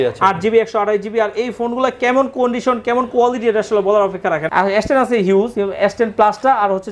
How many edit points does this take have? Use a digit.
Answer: 2